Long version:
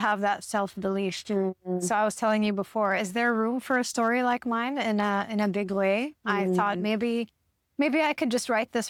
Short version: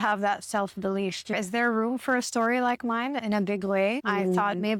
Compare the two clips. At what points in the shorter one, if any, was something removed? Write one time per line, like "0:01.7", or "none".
0:01.3
0:03.2
0:04.0